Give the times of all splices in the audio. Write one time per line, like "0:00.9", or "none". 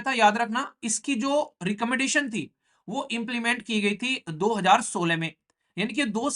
none